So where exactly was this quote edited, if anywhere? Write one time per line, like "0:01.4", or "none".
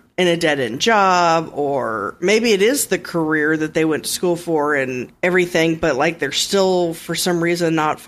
none